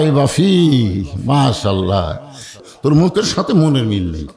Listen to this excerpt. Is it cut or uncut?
cut